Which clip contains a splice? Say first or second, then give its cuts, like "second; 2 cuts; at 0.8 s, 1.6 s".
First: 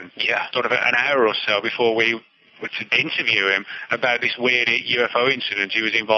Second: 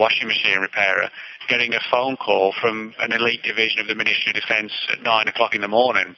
first; 1 cut; at 2.8 s